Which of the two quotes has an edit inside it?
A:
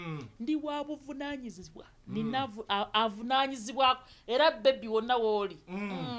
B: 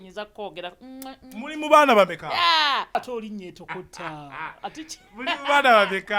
B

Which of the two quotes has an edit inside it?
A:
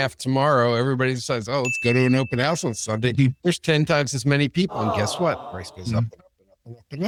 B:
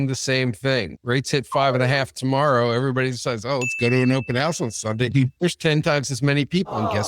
B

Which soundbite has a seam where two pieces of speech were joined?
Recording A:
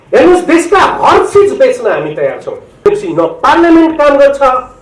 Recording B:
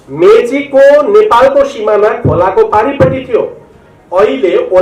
A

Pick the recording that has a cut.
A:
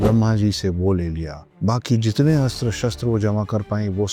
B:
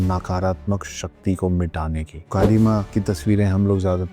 B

